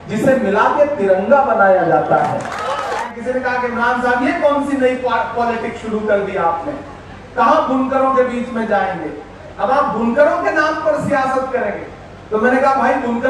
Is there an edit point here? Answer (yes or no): yes